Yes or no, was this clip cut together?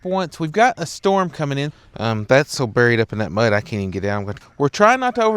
yes